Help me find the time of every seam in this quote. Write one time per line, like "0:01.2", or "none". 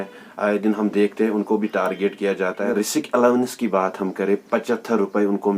0:02.6